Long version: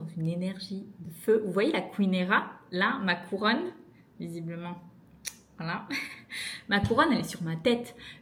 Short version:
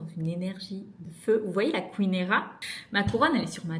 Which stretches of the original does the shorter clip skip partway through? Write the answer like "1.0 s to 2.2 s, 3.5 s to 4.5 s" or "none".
2.6 s to 6.4 s